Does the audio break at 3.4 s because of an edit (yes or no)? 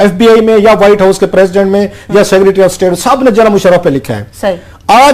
no